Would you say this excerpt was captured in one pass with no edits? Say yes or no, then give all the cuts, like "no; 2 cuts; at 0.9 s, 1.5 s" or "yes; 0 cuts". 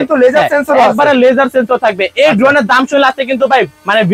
yes; 0 cuts